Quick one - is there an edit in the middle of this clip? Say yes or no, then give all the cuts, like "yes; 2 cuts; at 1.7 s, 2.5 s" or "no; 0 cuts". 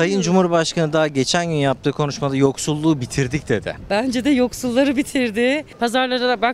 yes; 2 cuts; at 3.7 s, 5.7 s